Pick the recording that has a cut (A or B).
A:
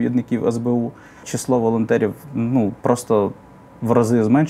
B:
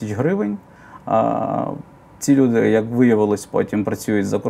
A